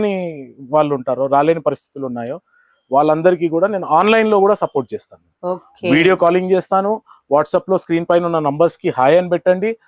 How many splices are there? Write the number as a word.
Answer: zero